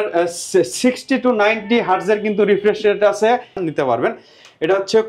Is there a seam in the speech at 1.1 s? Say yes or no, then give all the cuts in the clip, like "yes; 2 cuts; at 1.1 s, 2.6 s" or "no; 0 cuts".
no; 1 cut; at 3.6 s